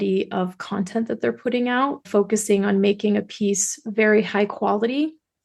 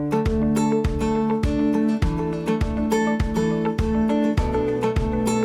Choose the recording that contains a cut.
first; 1 cut; at 2.1 s

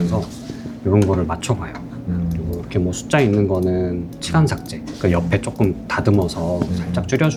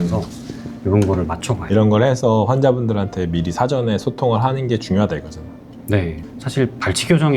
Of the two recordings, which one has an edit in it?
second; 1 cut; at 1.6 s

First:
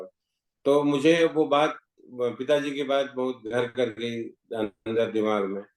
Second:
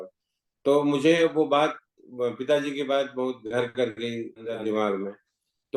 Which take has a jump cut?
second; 1 cut; at 4.4 s

